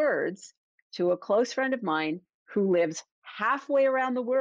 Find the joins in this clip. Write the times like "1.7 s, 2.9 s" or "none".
none